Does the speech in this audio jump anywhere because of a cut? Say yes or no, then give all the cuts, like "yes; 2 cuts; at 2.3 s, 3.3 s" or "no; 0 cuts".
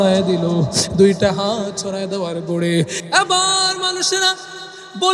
yes; 1 cut; at 3.0 s